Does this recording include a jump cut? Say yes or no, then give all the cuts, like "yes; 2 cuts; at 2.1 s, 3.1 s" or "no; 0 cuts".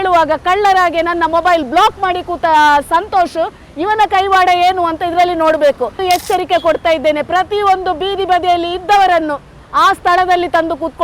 yes; 1 cut; at 6.0 s